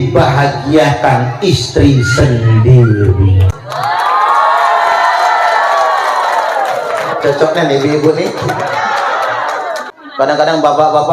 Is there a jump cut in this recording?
yes; 1 cut; at 9.9 s

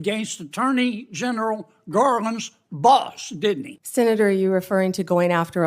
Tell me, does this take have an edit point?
yes; 1 cut; at 3.7 s

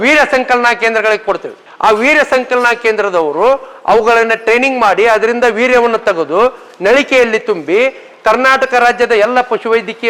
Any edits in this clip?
no; 0 cuts

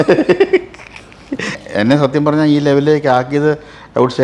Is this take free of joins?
no; 1 cut; at 1.6 s

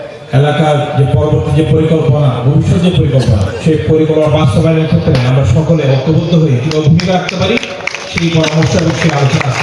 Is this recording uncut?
no; 1 cut; at 4.5 s

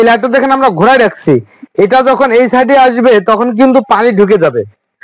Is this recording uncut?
yes; 0 cuts

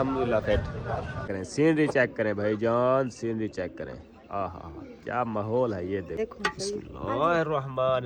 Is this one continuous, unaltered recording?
no; 2 cuts; at 1.2 s, 6.2 s

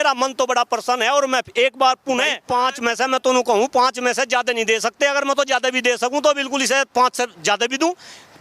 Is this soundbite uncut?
no; 1 cut; at 2.4 s

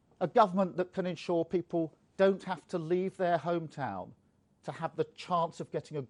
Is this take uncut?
yes; 0 cuts

